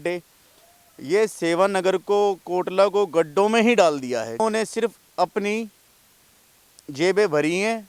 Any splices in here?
yes; 1 cut; at 4.4 s

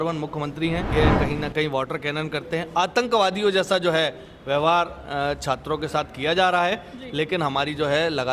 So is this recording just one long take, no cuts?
no; 1 cut; at 0.9 s

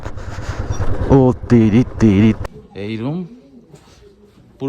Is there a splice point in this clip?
yes; 1 cut; at 2.4 s

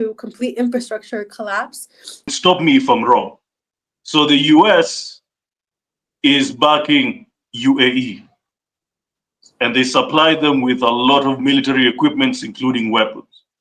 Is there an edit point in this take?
yes; 1 cut; at 2.3 s

